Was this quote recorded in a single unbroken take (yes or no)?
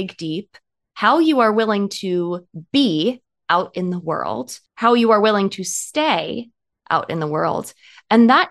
no